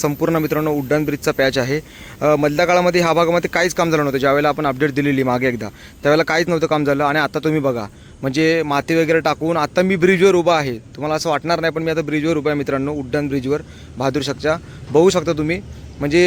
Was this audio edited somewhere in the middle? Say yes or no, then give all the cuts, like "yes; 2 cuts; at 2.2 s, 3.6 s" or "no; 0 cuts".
no; 0 cuts